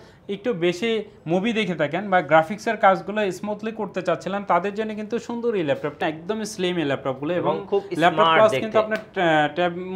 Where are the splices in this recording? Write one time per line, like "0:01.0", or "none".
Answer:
0:06.0